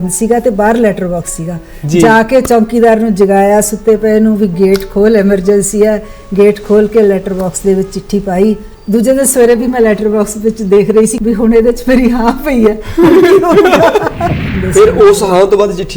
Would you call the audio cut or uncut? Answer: cut